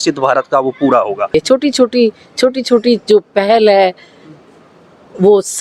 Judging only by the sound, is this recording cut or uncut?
cut